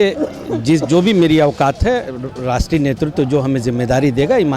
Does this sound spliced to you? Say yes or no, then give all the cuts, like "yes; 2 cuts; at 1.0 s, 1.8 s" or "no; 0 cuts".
no; 0 cuts